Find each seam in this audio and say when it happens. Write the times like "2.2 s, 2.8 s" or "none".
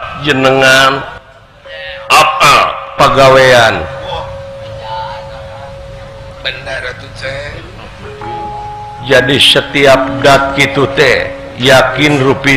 none

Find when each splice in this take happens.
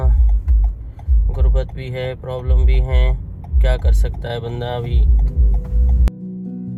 none

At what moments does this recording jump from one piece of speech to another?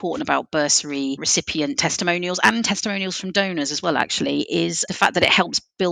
1.2 s, 4.8 s

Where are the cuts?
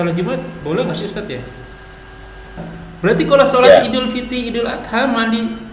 2.5 s

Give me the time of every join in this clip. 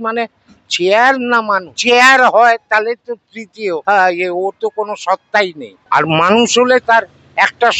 1.8 s, 3.8 s, 5.7 s

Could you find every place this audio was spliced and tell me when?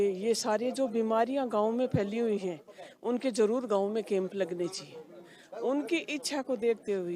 6.2 s

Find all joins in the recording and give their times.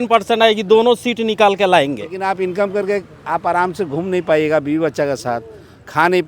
2.2 s

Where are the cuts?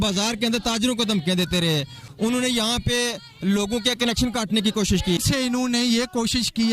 2.0 s, 5.2 s

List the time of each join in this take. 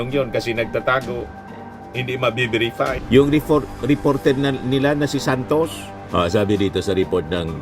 3.0 s

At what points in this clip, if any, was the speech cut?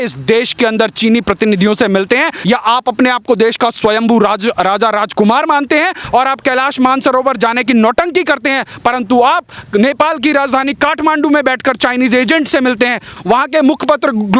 2.4 s, 6.0 s, 13.1 s

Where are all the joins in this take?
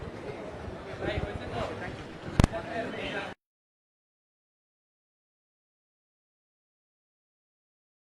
none

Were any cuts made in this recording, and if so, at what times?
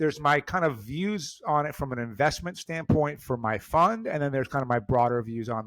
none

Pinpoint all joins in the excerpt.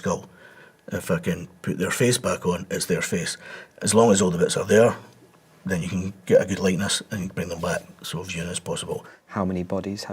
3.7 s, 9.2 s

